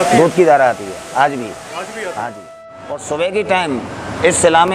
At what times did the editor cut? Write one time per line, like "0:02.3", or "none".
0:03.0